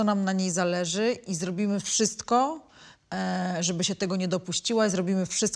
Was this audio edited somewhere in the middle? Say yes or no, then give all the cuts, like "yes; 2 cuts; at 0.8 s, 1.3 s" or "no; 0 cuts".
no; 0 cuts